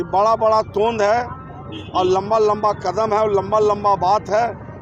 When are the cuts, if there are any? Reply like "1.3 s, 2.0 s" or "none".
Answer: none